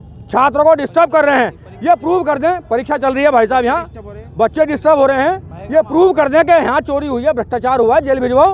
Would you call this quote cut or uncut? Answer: uncut